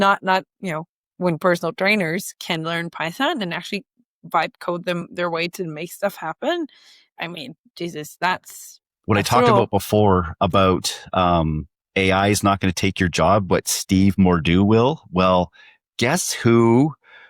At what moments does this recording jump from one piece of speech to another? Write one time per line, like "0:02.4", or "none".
0:08.9